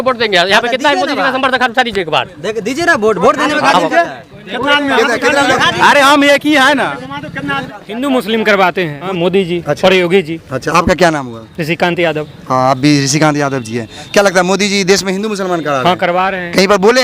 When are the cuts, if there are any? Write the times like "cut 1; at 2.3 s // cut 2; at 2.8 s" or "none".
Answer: cut 1; at 7.7 s // cut 2; at 9.0 s